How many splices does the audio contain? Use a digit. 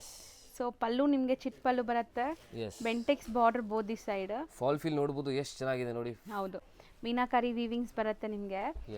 1